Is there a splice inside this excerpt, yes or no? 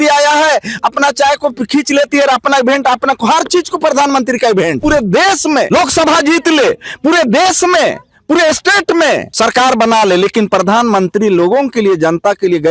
yes